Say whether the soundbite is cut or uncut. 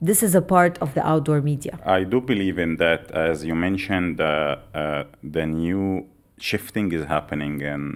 uncut